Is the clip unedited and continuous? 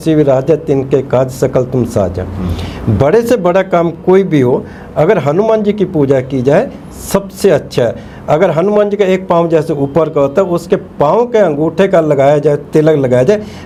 yes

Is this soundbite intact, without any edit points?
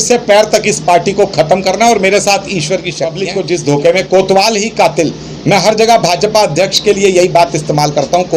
no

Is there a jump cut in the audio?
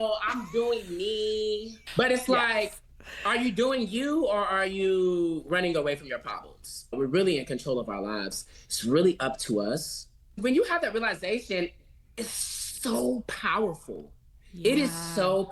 yes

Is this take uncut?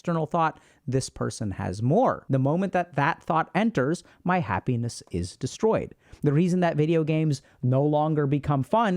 no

